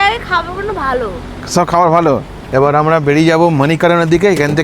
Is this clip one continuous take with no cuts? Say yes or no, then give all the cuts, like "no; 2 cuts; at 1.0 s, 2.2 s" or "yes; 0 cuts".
no; 1 cut; at 2.4 s